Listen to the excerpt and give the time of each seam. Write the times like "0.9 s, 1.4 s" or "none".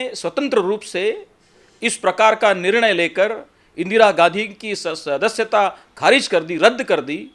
none